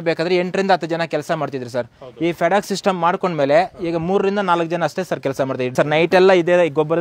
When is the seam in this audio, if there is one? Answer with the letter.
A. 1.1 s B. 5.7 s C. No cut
B